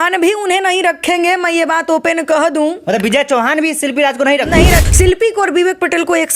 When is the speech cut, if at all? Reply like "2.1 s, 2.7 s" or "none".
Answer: 4.8 s